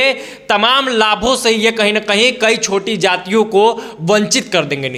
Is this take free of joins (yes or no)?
yes